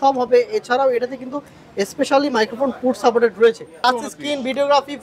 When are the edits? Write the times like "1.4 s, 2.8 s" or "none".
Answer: 3.8 s

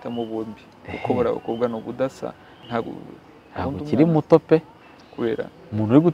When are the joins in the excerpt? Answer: 2.5 s

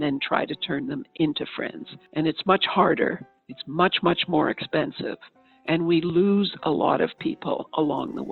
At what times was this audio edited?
none

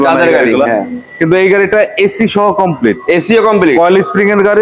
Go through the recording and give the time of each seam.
none

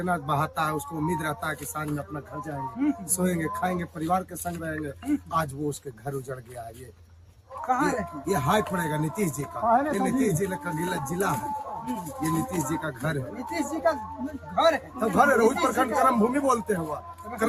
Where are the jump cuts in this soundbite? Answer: none

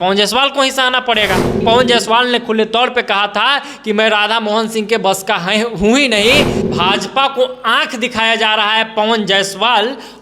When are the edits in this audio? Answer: 1.6 s, 6.6 s

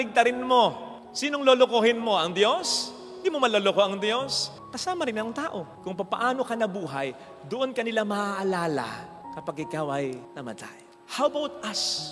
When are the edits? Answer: none

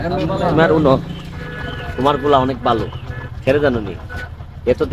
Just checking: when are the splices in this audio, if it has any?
none

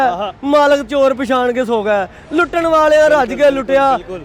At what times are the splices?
none

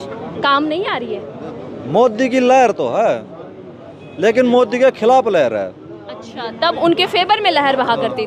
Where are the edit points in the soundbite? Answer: none

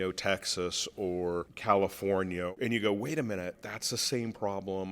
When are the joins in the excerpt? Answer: 1.5 s, 2.5 s, 3.5 s

